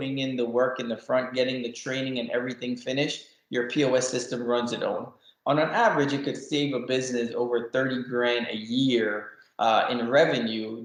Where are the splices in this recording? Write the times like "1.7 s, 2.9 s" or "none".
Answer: none